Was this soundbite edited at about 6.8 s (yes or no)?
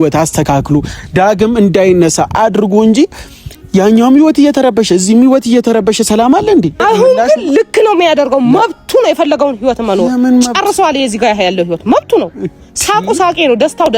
yes